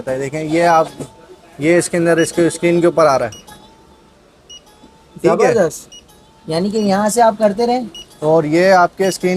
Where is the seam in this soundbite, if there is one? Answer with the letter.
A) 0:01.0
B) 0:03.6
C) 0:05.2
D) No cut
D